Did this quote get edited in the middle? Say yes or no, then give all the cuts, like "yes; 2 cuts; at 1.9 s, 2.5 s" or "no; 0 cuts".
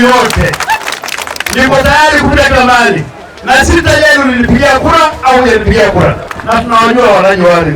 yes; 1 cut; at 6.3 s